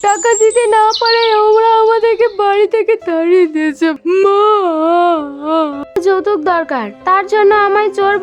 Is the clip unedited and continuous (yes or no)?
no